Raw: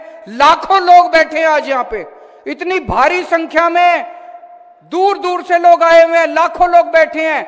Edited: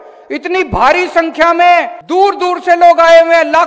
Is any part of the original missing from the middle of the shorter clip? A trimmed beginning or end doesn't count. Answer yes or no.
yes